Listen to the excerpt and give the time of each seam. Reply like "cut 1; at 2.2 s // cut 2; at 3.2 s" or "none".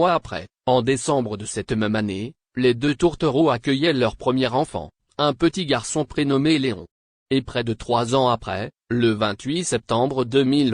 cut 1; at 8.1 s